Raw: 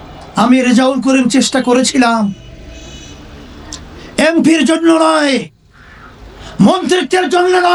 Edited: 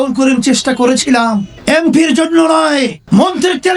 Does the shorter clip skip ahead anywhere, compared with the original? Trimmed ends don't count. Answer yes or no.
yes